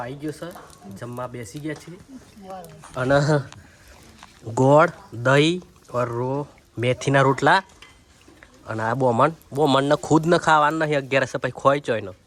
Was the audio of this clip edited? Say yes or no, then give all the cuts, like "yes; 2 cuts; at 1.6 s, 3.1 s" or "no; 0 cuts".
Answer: no; 0 cuts